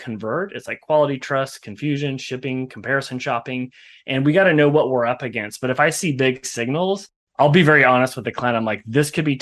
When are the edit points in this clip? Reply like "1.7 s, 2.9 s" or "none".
7.2 s